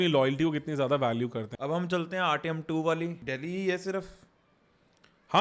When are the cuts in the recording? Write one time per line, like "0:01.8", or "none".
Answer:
0:01.4
0:03.2